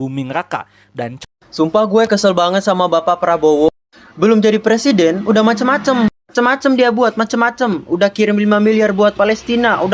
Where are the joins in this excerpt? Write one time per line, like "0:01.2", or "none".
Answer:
0:01.2